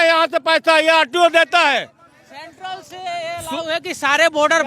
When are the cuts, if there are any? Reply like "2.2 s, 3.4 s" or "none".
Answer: none